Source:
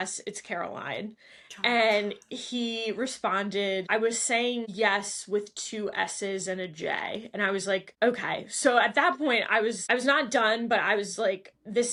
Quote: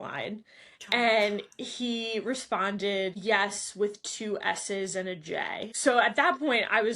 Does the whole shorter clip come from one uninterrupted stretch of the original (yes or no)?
no